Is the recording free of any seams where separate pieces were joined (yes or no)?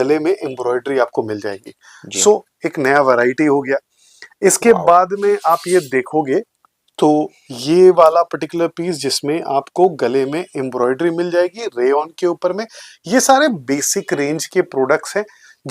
yes